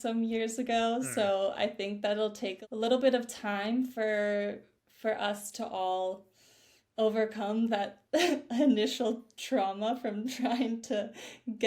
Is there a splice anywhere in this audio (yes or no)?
yes